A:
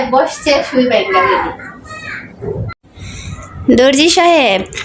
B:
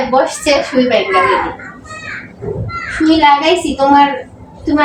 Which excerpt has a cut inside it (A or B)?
A